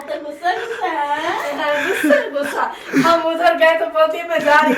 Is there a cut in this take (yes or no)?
no